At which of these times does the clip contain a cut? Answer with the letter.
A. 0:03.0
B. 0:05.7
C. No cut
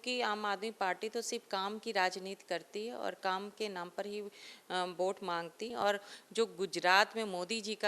B